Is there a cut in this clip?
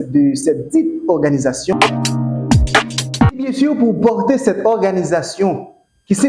yes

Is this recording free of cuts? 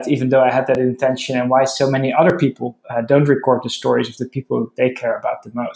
yes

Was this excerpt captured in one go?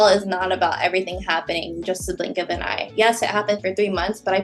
yes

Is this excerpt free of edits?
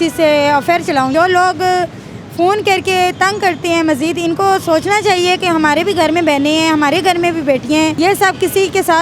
no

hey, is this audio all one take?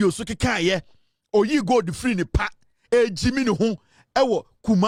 yes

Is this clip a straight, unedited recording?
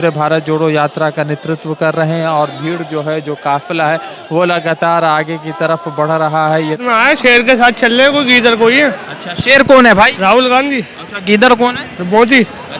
no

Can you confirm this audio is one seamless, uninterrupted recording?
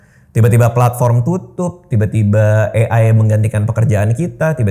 yes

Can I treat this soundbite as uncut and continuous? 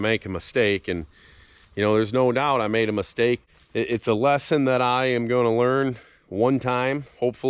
no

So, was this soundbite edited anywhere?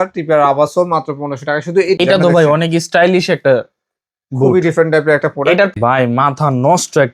yes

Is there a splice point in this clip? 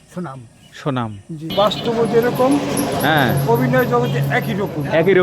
yes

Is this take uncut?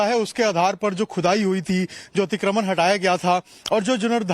no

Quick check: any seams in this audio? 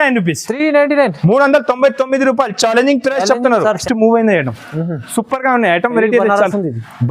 yes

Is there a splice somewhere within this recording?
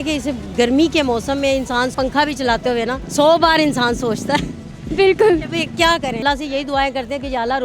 yes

